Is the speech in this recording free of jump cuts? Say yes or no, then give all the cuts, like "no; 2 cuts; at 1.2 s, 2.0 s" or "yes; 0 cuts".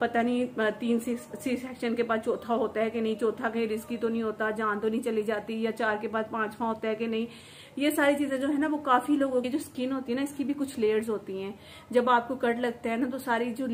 no; 1 cut; at 9.4 s